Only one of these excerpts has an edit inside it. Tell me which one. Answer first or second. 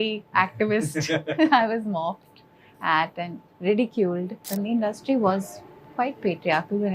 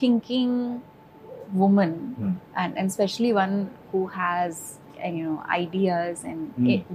first